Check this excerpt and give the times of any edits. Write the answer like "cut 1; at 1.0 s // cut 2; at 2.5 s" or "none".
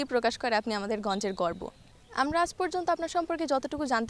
none